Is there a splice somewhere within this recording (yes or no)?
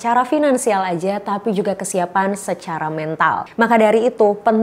no